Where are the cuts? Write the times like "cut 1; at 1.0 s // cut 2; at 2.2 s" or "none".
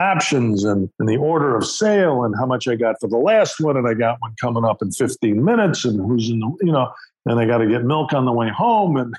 cut 1; at 0.9 s